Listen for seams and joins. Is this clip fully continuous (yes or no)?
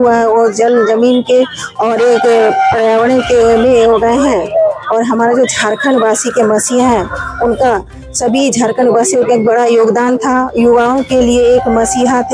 yes